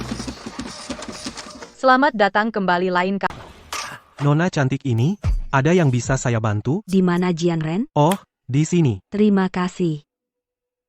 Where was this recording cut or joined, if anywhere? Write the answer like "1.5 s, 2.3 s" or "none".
3.3 s